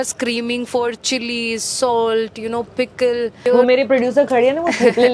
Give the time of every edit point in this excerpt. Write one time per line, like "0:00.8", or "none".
0:03.5